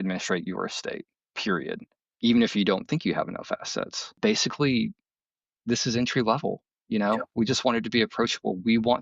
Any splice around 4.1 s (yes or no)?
yes